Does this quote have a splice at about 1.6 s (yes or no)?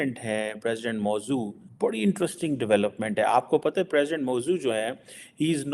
yes